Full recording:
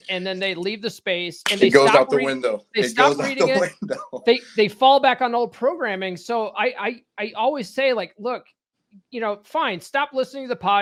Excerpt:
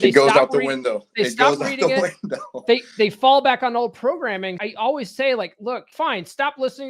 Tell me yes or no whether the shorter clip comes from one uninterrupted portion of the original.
no